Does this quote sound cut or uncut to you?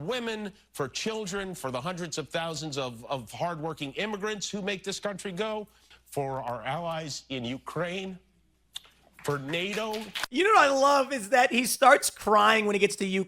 cut